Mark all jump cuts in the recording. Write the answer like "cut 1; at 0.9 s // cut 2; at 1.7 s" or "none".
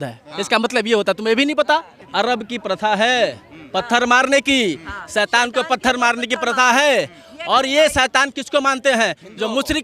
cut 1; at 2.1 s